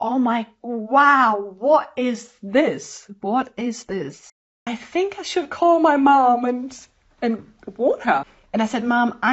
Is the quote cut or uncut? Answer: cut